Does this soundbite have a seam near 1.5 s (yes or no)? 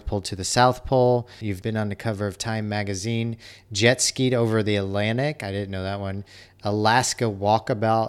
yes